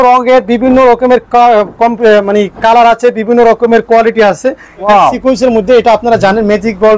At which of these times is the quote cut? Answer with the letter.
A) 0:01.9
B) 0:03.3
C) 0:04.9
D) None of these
C